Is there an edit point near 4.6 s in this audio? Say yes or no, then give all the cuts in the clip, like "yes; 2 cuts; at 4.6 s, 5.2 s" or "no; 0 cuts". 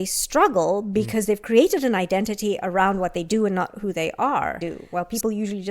yes; 1 cut; at 4.6 s